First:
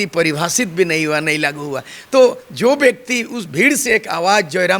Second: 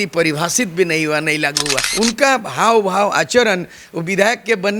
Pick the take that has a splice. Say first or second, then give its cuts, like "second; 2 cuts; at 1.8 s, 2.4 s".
second; 1 cut; at 1.8 s